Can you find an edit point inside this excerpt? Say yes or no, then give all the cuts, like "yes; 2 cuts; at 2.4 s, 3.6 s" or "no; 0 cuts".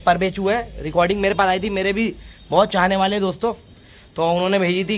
no; 0 cuts